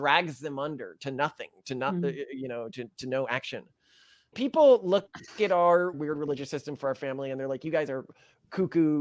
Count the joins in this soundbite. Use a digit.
2